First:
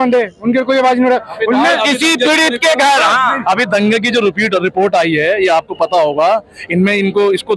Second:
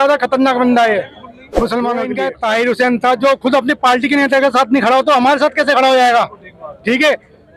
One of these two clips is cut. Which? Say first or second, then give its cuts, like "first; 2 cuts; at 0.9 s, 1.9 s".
second; 1 cut; at 2.2 s